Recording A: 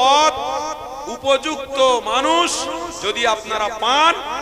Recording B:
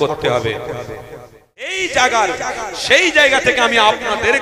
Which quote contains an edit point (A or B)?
B